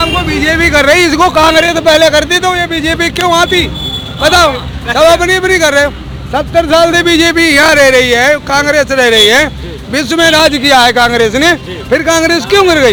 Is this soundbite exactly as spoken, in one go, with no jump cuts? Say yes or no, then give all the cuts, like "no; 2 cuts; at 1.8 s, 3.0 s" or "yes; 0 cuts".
yes; 0 cuts